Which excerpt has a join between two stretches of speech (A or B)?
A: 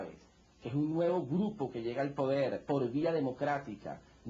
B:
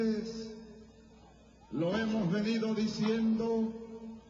B